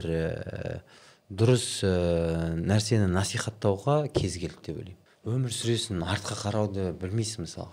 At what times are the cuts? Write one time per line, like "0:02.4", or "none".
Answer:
0:05.0